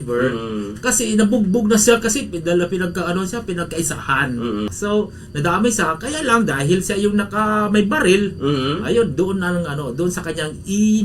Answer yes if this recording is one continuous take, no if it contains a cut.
no